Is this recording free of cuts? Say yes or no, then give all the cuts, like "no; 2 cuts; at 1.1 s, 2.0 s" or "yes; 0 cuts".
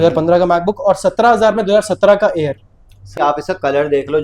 no; 1 cut; at 3.1 s